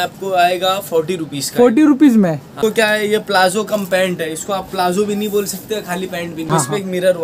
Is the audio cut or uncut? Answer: cut